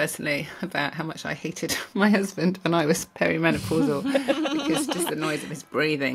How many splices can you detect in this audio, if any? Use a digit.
0